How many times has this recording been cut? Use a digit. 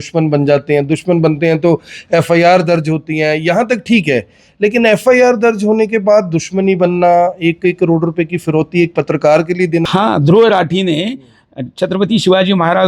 1